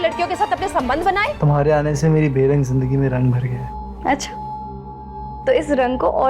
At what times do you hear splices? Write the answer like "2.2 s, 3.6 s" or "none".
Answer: 1.4 s

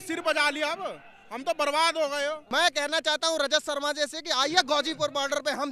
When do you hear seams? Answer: 2.4 s

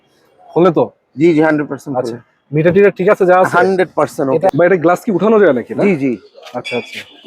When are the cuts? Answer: 4.5 s

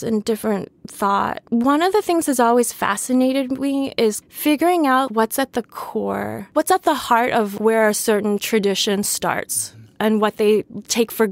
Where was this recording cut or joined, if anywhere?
7.6 s

